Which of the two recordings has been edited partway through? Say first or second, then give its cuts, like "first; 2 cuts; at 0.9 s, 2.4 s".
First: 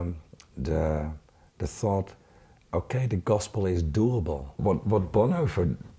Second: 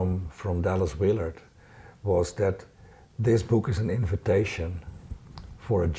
first; 1 cut; at 4.6 s